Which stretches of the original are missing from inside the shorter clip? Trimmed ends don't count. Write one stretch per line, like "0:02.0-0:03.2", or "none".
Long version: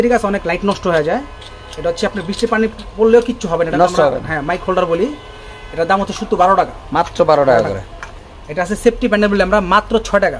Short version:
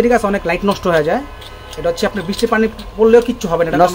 none